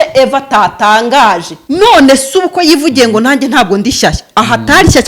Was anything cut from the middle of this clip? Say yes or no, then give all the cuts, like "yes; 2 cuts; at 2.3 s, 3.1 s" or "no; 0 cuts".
yes; 1 cut; at 1.5 s